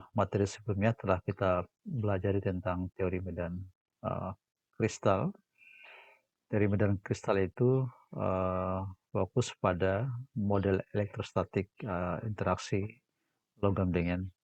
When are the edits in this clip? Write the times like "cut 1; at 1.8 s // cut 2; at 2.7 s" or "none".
none